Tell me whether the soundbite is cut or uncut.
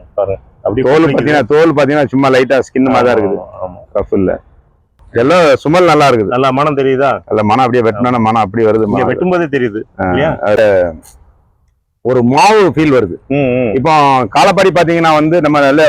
cut